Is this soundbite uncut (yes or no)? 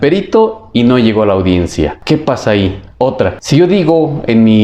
no